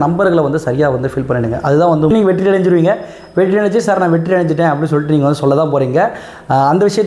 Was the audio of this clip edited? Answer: yes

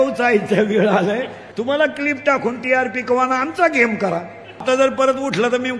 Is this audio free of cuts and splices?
no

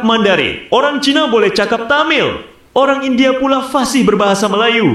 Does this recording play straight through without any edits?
yes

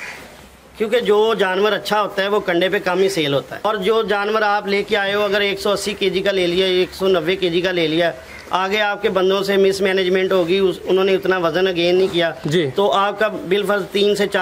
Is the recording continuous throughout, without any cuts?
no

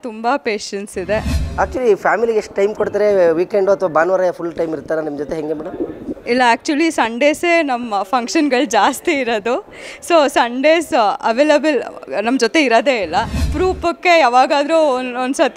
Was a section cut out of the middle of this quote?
yes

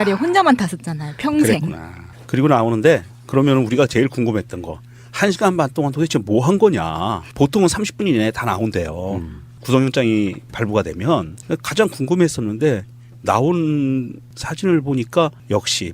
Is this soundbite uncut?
no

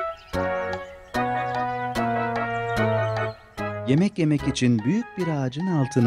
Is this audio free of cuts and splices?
no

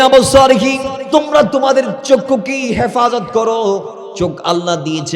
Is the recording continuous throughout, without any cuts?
no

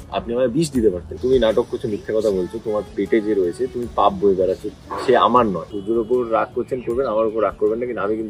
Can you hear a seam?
yes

